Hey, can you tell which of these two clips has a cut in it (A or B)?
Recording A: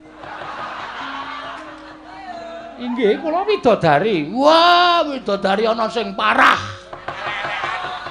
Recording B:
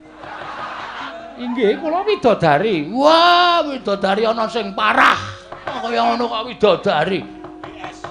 B